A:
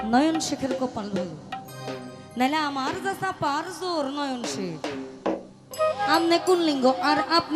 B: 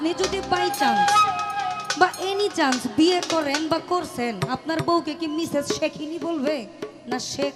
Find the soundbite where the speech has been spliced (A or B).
A